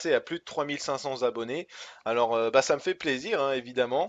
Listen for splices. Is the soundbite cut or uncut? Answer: cut